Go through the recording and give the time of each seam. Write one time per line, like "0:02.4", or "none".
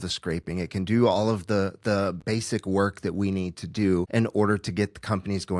0:04.1